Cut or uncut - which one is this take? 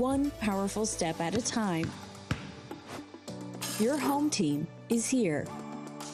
uncut